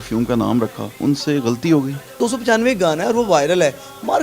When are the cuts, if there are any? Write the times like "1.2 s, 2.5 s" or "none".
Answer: 0.9 s, 2.2 s